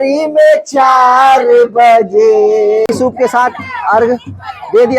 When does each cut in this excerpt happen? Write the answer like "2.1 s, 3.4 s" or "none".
2.9 s